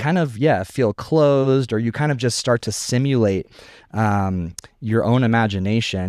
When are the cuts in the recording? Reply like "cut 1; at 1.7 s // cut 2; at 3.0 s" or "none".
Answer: none

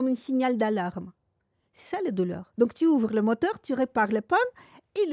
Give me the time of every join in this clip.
cut 1; at 2.4 s

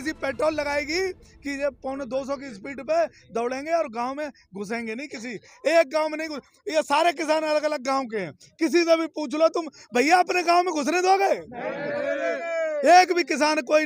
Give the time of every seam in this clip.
none

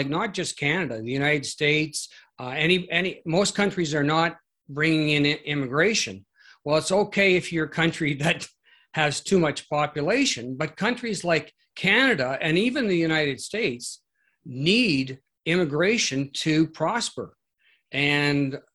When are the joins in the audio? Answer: none

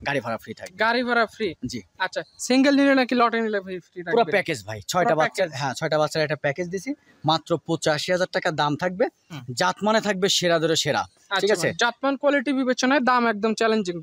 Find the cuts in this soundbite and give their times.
none

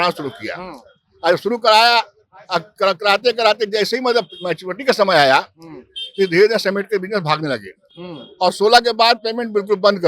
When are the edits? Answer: none

